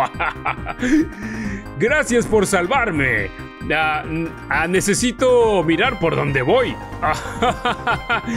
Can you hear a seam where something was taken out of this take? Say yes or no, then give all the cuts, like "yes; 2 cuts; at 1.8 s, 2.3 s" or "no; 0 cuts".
yes; 2 cuts; at 4.4 s, 6.9 s